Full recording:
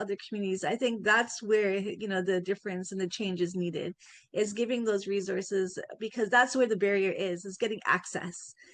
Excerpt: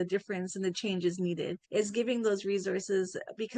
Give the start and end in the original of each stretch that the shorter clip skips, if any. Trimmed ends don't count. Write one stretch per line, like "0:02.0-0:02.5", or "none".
0:04.0-0:04.2